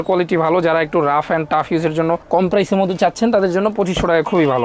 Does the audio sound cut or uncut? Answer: uncut